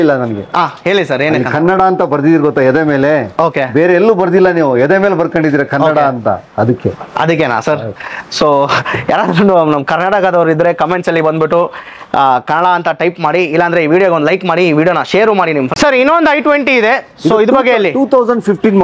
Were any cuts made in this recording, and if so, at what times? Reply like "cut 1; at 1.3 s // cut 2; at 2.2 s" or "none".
none